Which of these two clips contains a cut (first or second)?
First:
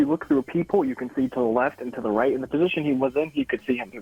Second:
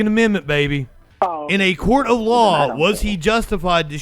second